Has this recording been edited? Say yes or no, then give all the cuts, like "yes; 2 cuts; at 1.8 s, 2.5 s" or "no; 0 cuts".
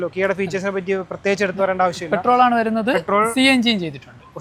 no; 0 cuts